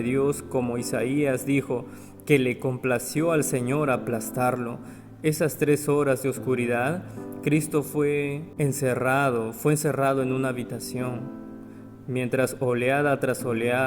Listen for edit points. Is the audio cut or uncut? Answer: cut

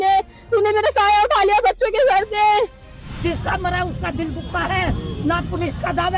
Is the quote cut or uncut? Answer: cut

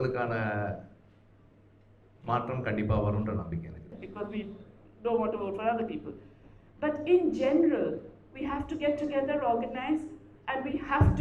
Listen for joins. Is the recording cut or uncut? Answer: cut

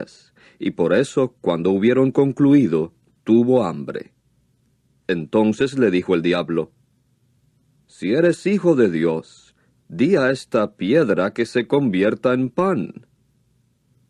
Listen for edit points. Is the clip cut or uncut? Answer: cut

